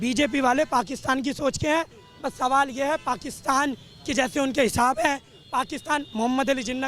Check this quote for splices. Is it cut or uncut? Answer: uncut